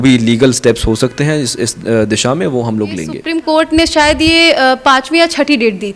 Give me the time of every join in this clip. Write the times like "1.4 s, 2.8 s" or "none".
3.4 s